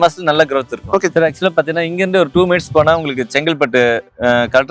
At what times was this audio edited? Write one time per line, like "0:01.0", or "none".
0:01.1